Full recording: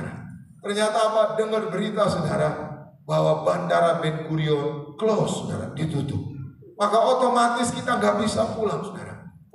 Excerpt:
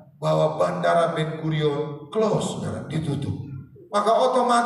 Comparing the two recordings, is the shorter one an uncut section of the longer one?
yes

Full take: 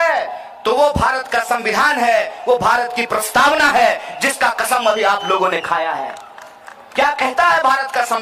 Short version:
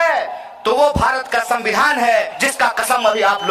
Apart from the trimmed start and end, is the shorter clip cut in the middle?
yes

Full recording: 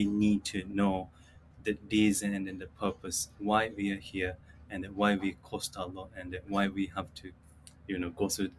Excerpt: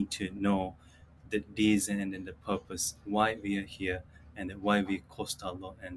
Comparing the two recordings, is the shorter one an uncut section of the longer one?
yes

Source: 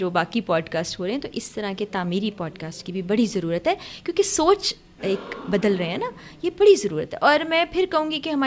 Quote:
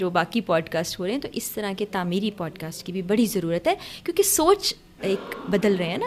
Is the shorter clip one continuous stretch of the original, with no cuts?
yes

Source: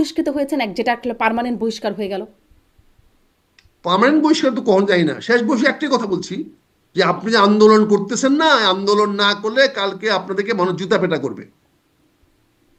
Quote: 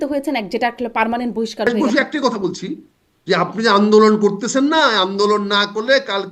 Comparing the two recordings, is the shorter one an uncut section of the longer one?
no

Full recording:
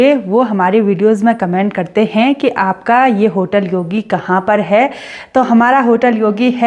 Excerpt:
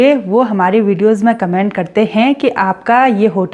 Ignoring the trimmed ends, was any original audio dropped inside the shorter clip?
no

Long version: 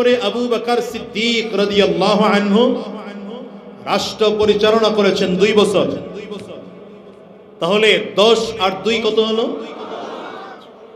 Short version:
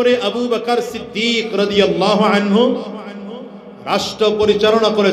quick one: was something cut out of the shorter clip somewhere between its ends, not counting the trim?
no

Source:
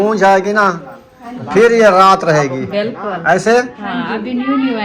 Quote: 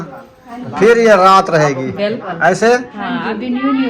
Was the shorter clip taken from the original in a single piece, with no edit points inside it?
no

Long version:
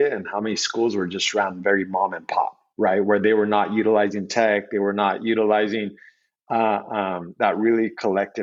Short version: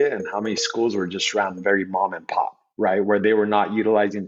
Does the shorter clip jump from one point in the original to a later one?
no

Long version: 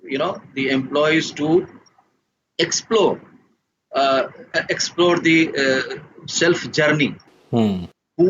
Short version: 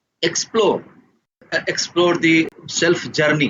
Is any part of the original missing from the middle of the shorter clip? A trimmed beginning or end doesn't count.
yes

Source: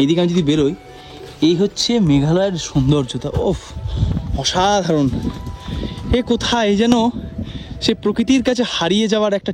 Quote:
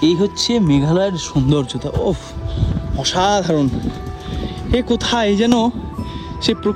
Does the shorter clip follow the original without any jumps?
yes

